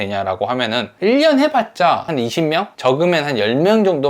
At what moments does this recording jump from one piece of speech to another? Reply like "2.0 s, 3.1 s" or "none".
2.1 s